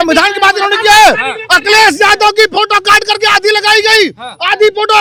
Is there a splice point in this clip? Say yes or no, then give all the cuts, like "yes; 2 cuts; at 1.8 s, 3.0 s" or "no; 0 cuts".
no; 0 cuts